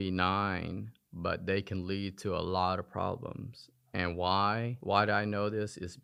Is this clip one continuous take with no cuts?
yes; 0 cuts

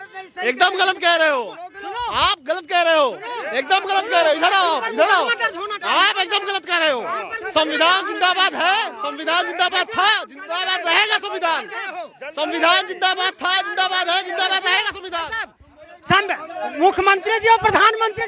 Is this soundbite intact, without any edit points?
yes; 0 cuts

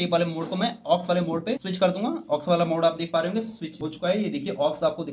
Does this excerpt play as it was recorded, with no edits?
yes; 0 cuts

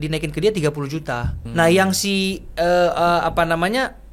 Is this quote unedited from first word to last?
no; 1 cut; at 1.4 s

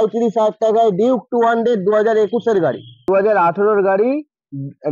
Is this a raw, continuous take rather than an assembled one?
no; 1 cut; at 3.0 s

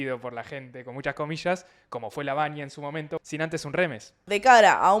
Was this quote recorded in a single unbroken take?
no; 2 cuts; at 3.2 s, 4.2 s

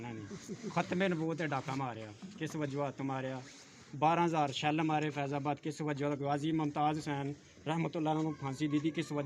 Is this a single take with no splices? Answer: yes; 0 cuts

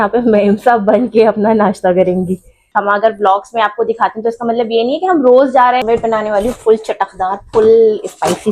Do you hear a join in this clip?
yes; 2 cuts; at 2.7 s, 5.8 s

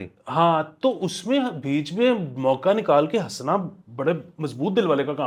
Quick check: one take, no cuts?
yes; 0 cuts

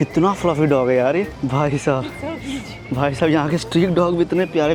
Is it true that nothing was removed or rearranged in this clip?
yes; 0 cuts

